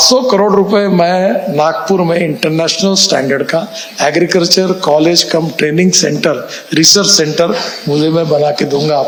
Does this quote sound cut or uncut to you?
uncut